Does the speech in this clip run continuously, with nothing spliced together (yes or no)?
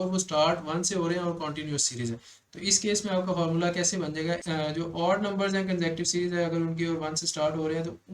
no